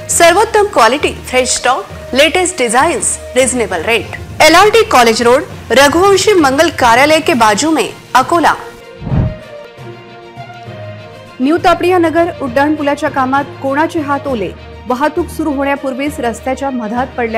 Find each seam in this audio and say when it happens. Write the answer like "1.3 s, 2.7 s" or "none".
none